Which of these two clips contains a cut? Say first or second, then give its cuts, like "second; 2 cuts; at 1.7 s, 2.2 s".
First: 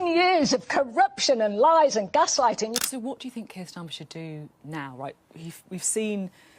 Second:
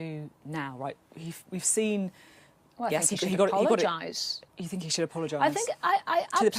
first; 1 cut; at 2.8 s